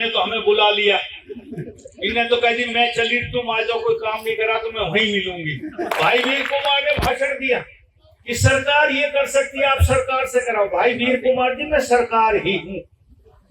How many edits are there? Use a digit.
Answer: 1